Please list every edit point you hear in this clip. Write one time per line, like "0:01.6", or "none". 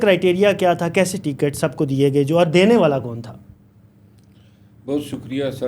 none